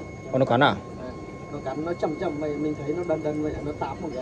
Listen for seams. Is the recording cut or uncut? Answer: uncut